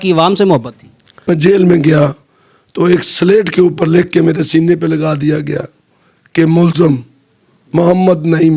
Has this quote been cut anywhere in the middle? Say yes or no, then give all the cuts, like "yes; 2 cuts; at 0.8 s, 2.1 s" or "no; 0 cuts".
yes; 1 cut; at 1.2 s